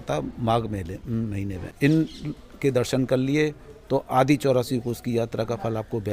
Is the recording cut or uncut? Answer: cut